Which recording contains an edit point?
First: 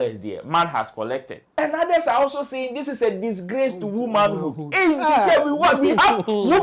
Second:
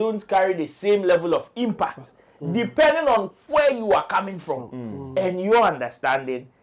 first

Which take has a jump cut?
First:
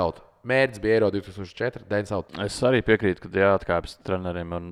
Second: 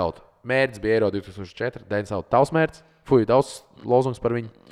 first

